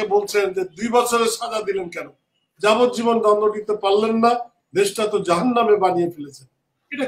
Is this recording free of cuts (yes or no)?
yes